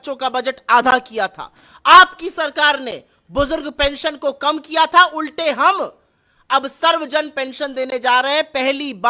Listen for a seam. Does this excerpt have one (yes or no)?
no